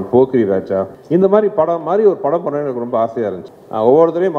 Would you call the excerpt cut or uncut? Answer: cut